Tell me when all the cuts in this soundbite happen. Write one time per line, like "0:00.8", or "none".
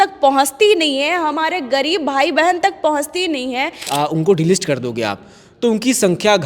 0:03.8